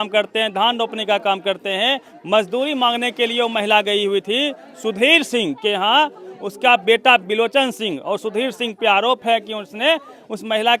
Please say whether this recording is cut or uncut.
uncut